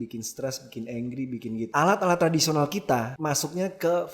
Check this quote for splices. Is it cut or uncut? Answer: cut